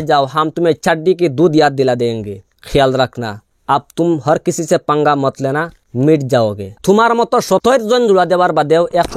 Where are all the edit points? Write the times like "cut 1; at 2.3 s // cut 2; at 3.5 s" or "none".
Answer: cut 1; at 6.7 s